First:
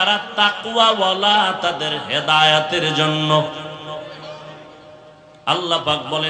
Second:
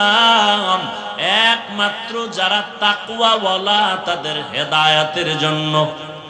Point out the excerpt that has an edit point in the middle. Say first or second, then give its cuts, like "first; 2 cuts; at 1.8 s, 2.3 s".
first; 1 cut; at 5.2 s